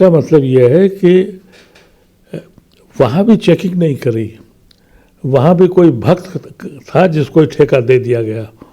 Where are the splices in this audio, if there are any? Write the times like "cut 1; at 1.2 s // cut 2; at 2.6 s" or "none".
none